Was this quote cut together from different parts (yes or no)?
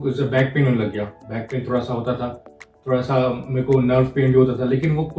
no